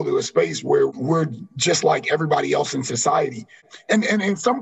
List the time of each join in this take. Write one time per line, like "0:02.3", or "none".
0:01.0
0:03.7